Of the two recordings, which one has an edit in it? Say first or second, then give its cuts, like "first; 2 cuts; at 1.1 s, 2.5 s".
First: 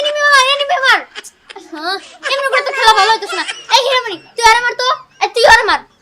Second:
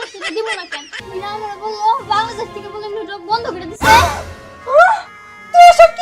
second; 1 cut; at 0.9 s